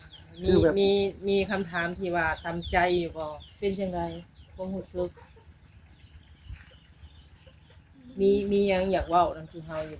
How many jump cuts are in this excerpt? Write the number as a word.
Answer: one